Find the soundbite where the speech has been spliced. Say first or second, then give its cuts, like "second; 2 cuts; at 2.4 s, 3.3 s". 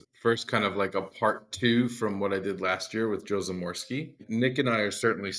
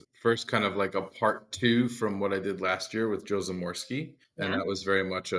first; 1 cut; at 4.2 s